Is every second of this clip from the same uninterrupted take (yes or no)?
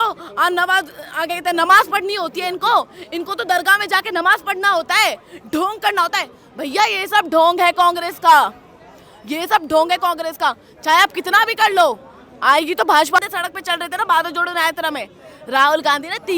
no